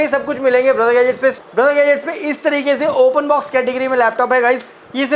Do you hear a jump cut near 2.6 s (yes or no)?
no